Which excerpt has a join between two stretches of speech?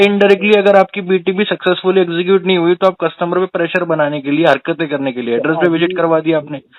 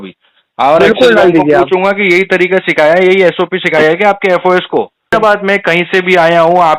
second; 1 cut; at 5.1 s

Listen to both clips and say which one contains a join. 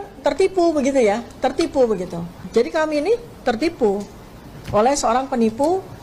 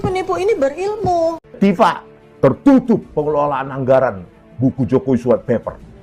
second; 1 cut; at 1.4 s

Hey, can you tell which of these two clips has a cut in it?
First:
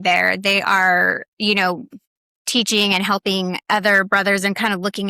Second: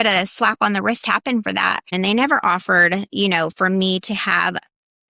second; 1 cut; at 1.9 s

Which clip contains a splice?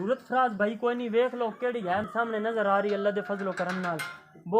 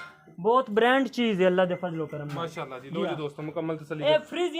first; 1 cut; at 2.1 s

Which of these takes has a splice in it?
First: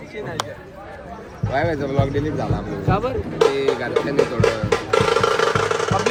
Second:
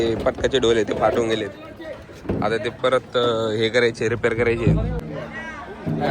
second; 1 cut; at 5.0 s

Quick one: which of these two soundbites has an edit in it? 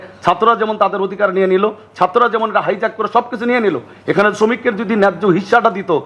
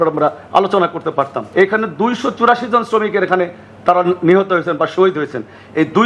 second; 1 cut; at 1.4 s

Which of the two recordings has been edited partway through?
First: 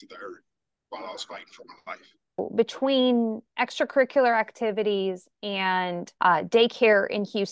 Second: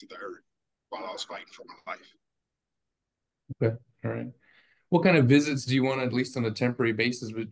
first; 2 cuts; at 2.5 s, 6.1 s

